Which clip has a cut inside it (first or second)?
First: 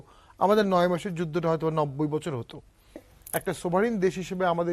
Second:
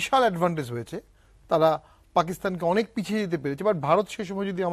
first